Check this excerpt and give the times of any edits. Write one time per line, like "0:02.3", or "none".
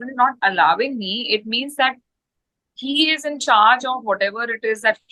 none